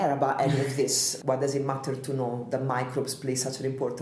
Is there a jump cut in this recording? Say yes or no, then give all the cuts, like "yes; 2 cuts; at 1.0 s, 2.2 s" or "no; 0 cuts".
yes; 1 cut; at 1.1 s